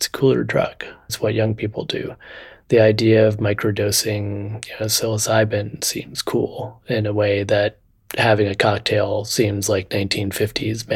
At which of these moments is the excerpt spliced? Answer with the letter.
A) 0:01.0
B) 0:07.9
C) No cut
A